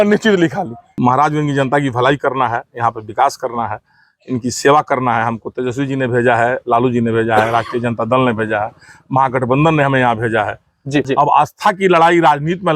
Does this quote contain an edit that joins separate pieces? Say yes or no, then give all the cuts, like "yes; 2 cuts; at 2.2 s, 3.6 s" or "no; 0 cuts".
yes; 2 cuts; at 0.9 s, 11.1 s